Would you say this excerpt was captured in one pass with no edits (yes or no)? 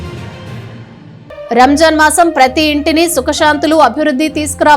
no